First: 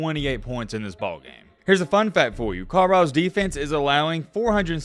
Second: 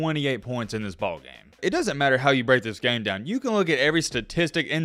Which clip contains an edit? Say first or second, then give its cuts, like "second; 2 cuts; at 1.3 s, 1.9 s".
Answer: first; 1 cut; at 1.4 s